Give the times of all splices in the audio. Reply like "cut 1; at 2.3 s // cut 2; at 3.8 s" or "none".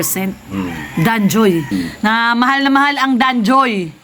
cut 1; at 1.7 s